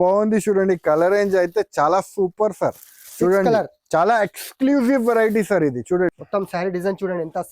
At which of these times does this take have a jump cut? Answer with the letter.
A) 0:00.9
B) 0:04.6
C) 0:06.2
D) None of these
C